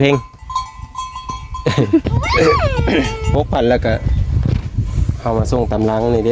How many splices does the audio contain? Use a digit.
1